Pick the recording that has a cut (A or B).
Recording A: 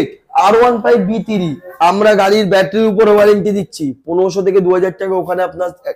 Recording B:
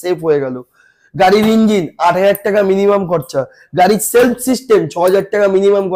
A